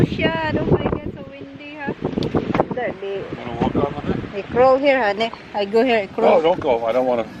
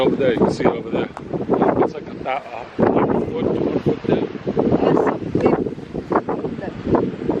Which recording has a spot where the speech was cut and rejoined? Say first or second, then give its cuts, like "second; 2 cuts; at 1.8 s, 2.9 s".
first; 1 cut; at 2.6 s